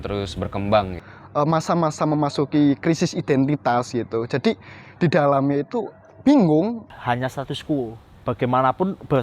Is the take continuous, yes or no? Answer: no